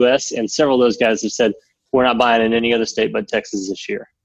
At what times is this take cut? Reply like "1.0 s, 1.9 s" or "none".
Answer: none

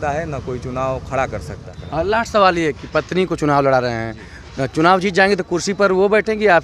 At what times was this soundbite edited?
1.7 s

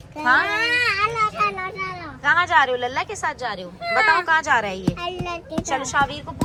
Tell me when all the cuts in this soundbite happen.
none

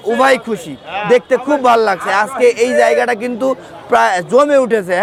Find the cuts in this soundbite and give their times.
none

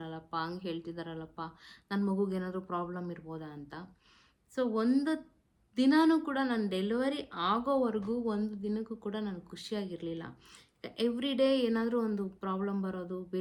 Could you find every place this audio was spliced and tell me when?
none

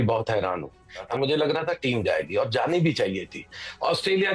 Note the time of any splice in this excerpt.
1.1 s

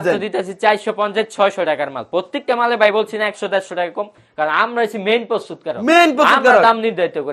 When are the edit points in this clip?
none

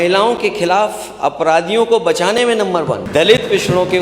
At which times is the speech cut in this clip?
3.0 s

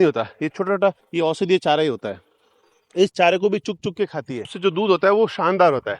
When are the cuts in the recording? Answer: 1.0 s, 4.5 s

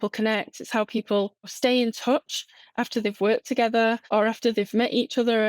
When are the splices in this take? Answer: 1.5 s, 4.0 s

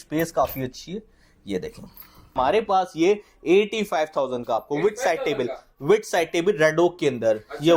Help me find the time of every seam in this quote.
2.4 s

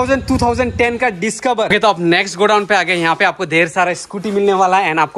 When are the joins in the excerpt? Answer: 1.7 s

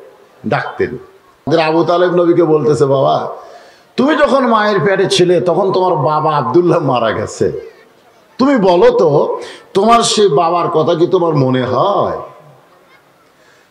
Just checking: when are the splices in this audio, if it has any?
1.5 s

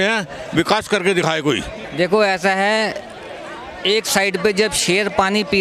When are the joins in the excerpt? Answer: 1.7 s

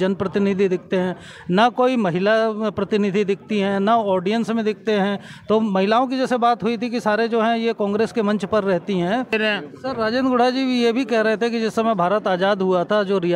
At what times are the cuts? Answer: 9.3 s

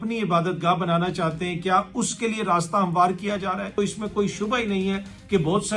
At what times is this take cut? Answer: 3.8 s

